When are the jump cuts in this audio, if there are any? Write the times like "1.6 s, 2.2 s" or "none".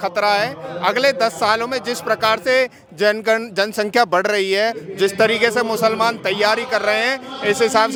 none